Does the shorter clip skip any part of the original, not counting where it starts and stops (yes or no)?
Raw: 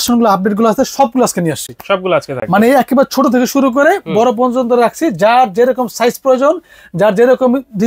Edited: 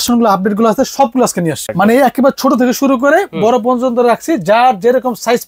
yes